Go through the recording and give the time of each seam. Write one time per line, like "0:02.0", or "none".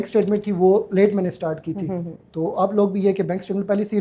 none